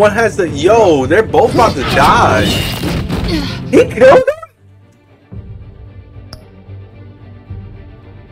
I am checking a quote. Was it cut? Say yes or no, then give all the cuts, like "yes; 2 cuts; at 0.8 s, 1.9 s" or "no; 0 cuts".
no; 0 cuts